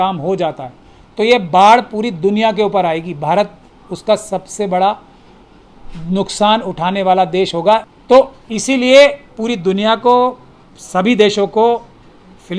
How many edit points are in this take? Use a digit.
1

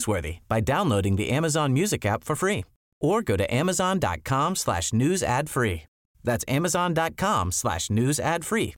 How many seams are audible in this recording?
0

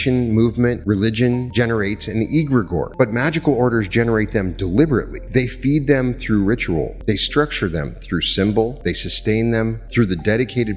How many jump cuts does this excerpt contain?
6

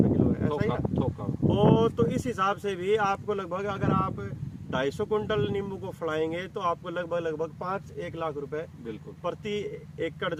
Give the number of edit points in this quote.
0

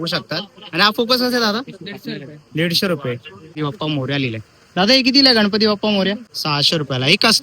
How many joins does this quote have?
2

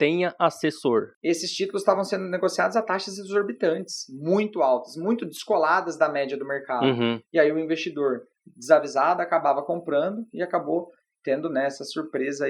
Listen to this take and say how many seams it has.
1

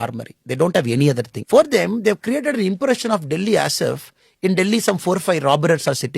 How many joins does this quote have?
1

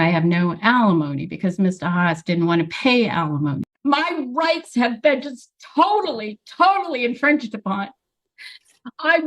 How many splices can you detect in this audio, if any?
1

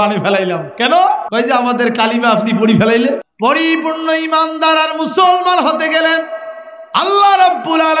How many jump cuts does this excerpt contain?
2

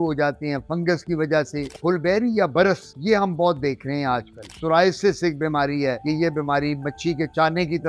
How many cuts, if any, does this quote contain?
3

